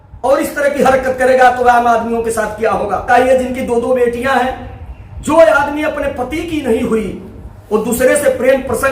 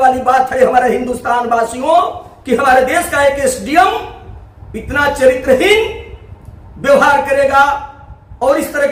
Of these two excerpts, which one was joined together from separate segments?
first; 1 cut; at 3.1 s

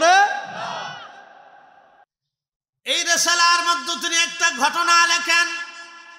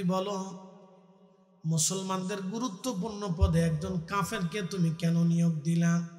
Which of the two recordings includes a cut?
first; 1 cut; at 2.1 s

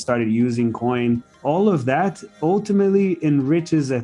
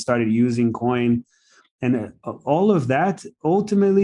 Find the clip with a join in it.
first; 1 cut; at 1.3 s

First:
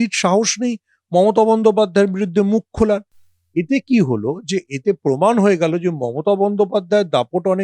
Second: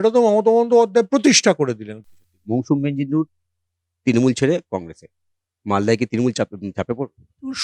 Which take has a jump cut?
second; 1 cut; at 1.9 s

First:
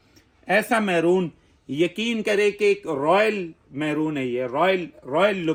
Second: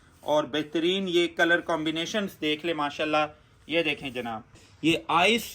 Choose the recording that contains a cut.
second; 1 cut; at 4.6 s

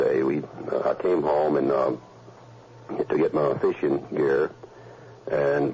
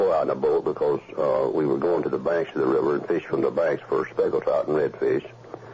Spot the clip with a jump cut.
second; 1 cut; at 3.6 s

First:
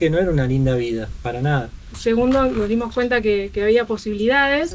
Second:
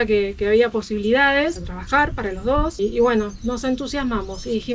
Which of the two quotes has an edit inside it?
first; 1 cut; at 1.9 s

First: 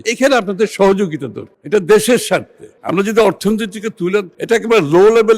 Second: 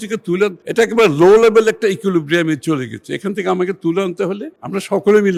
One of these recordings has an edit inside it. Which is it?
first; 1 cut; at 2.7 s

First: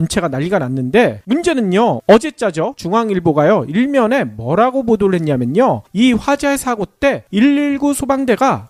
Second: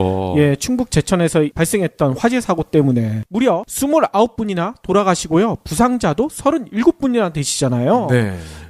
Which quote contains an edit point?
second; 1 cut; at 4.4 s

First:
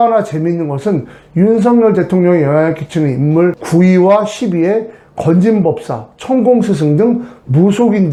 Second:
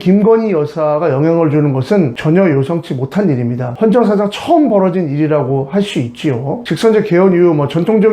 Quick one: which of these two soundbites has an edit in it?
second; 1 cut; at 6.6 s

